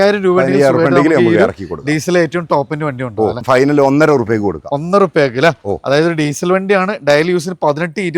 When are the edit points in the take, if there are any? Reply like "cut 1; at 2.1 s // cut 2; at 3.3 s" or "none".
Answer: cut 1; at 3.3 s